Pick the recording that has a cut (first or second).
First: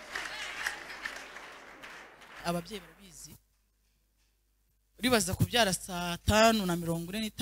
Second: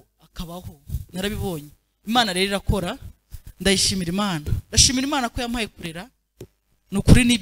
first